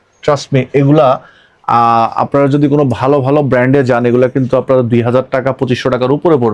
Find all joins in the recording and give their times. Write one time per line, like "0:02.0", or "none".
none